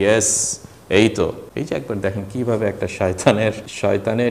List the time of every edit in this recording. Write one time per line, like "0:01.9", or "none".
0:01.4